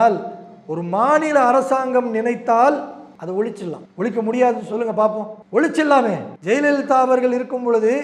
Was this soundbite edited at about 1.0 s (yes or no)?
no